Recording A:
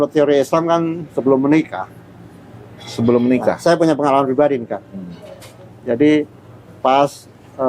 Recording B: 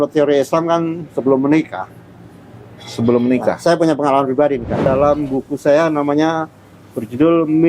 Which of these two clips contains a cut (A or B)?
B